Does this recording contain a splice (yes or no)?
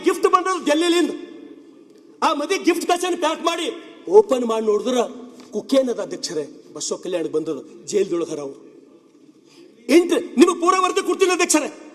no